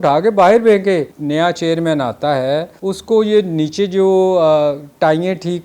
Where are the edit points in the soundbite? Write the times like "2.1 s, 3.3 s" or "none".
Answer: 1.2 s, 2.7 s